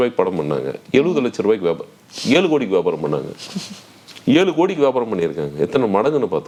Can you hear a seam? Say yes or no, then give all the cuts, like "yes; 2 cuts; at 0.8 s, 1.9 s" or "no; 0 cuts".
no; 0 cuts